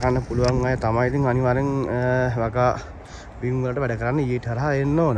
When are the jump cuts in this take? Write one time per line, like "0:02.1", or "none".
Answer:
none